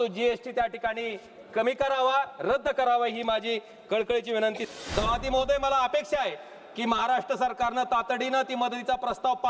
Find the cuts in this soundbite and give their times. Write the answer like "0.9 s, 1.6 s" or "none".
4.6 s